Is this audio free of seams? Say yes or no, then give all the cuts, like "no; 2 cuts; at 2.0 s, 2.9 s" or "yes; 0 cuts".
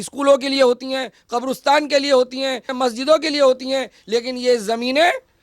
yes; 0 cuts